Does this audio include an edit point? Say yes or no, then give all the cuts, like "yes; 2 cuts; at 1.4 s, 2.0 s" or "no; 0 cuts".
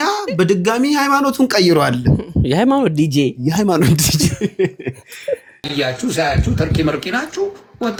no; 0 cuts